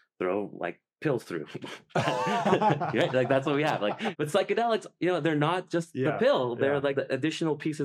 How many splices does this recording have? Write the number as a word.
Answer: two